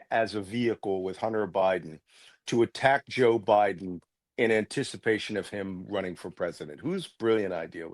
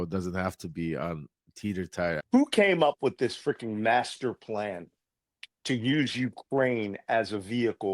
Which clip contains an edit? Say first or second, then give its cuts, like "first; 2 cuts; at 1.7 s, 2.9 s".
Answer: second; 1 cut; at 2.2 s